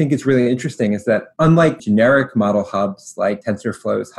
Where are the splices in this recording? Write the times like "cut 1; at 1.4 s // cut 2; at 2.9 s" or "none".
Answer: cut 1; at 1.8 s // cut 2; at 3.4 s

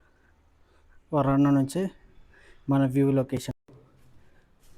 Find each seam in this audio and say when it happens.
cut 1; at 3.5 s

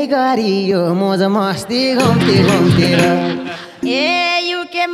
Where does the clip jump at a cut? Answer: cut 1; at 3.8 s

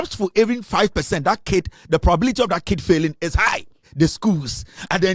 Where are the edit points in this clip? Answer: cut 1; at 3.9 s

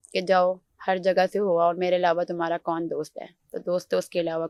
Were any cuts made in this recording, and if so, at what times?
none

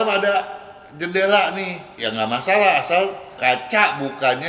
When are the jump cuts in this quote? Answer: cut 1; at 2.0 s

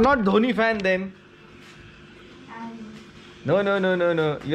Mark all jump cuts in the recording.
none

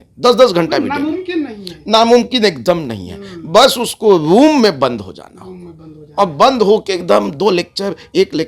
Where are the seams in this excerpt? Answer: none

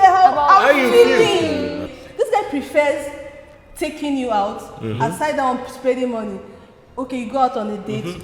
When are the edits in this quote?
cut 1; at 2.0 s

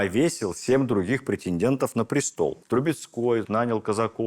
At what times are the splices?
cut 1; at 2.6 s

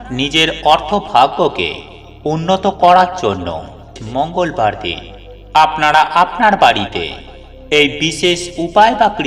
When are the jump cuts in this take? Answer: cut 1; at 4.0 s

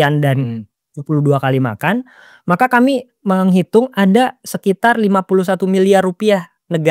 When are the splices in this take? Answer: none

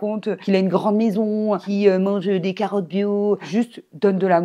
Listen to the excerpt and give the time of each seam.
cut 1; at 3.4 s

